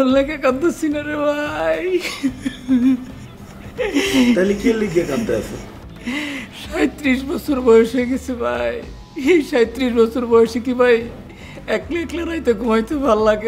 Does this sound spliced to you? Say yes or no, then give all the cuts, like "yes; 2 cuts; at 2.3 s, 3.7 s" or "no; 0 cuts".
no; 0 cuts